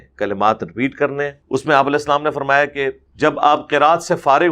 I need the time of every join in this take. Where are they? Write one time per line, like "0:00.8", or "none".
0:01.4
0:03.0